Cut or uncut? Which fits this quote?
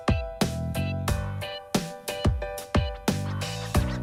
uncut